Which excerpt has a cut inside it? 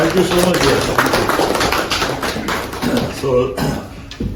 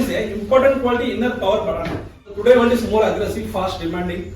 second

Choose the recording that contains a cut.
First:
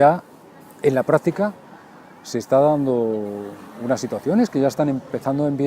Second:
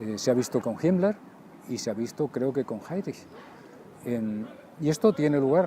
first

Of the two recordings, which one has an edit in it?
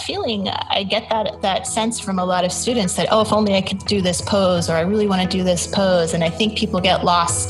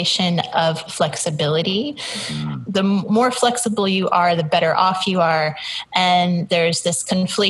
second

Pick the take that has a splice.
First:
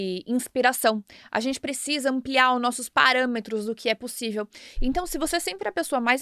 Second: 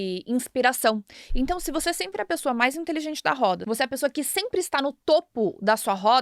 second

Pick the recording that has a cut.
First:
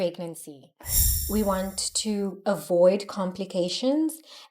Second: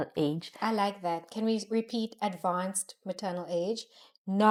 first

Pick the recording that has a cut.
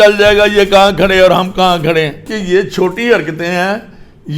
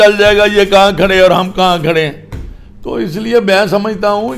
first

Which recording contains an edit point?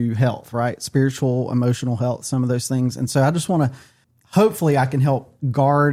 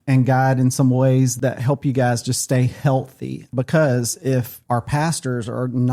second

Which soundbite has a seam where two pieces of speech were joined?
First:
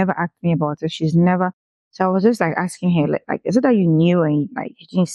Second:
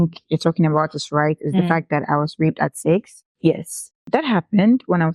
second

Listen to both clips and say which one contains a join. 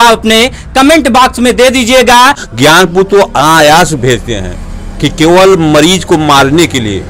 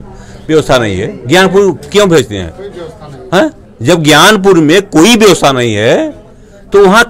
first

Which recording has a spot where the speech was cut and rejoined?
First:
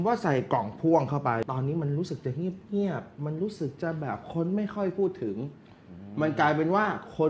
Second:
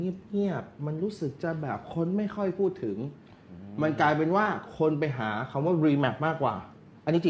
first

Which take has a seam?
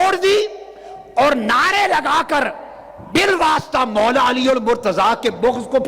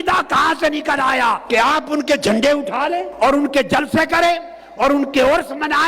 second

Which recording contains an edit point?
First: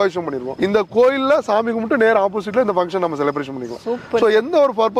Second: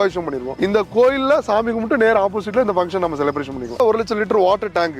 second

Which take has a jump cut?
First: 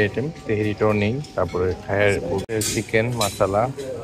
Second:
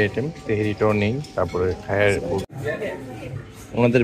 second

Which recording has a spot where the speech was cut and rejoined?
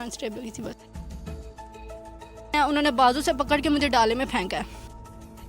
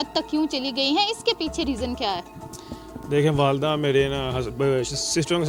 first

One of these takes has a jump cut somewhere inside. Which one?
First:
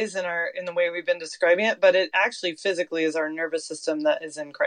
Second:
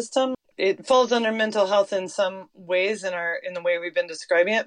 second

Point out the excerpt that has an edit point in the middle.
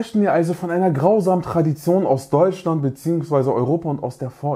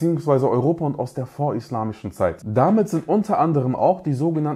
second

